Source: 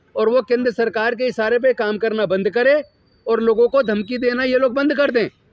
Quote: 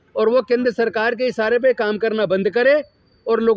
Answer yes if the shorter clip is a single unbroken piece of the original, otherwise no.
yes